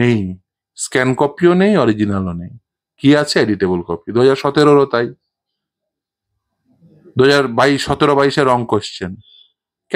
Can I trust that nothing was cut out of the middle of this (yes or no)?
yes